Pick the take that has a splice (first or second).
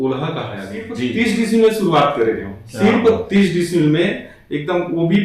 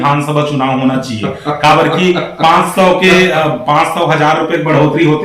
first